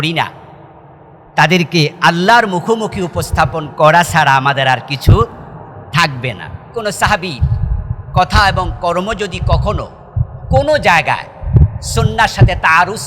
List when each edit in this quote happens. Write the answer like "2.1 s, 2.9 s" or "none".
6.7 s